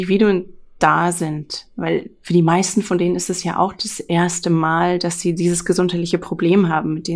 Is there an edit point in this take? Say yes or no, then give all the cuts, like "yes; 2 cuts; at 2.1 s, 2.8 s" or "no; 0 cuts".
no; 0 cuts